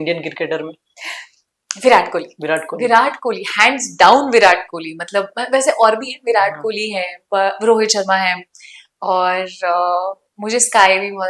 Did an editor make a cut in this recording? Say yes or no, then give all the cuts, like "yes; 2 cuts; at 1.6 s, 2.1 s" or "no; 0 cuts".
no; 0 cuts